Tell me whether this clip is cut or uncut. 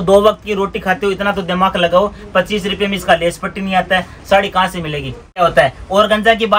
cut